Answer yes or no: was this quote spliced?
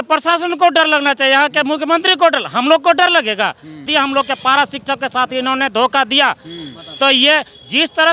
yes